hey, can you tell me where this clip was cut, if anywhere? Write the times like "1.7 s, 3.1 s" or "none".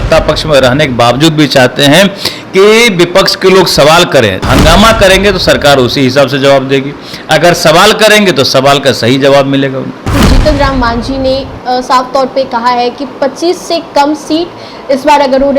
4.4 s, 10.1 s